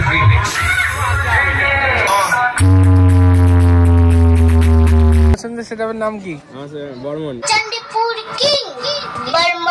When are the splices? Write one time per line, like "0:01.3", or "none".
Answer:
0:05.4

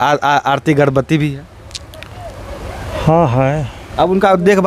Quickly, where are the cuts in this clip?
0:03.8

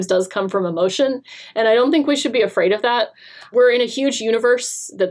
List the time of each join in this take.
0:03.5

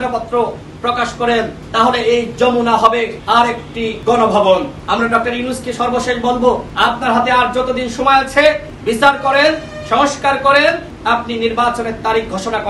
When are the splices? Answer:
0:01.6
0:03.6
0:04.8
0:06.7
0:08.7
0:10.9

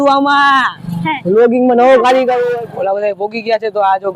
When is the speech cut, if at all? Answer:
0:02.4

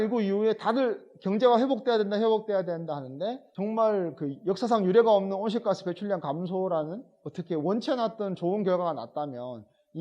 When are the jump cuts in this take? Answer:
0:03.5

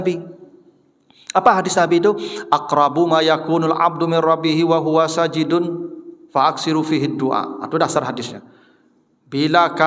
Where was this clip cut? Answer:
none

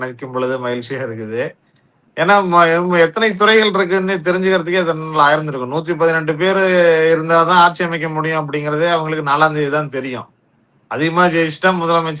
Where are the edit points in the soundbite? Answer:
none

